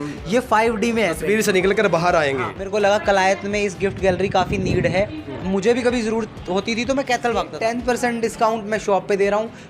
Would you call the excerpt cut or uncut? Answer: cut